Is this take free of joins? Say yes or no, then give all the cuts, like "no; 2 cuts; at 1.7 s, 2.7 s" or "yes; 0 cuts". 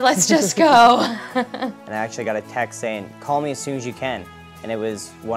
no; 1 cut; at 1.8 s